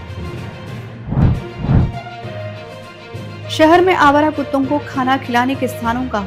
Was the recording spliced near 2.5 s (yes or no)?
no